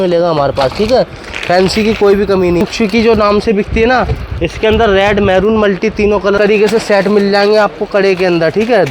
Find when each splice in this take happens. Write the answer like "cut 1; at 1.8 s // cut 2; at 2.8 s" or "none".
cut 1; at 2.6 s // cut 2; at 6.4 s